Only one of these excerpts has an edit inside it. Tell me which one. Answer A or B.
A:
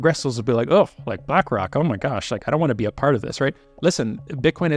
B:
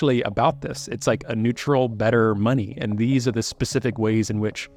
A